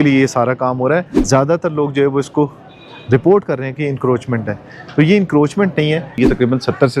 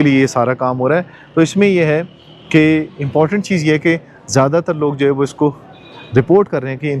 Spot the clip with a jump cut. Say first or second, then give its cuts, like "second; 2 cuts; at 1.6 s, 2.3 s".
first; 2 cuts; at 1.1 s, 6.2 s